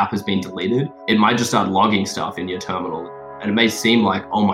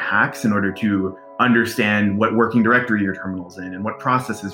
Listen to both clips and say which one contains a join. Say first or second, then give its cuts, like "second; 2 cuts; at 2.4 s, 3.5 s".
first; 2 cuts; at 0.9 s, 3.4 s